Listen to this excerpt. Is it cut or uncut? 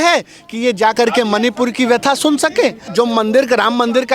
cut